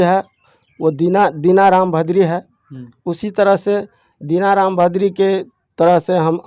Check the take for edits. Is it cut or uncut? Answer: uncut